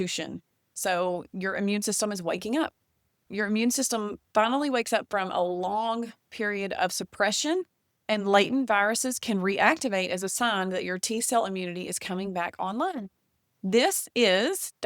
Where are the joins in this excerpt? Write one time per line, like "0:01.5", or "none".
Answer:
none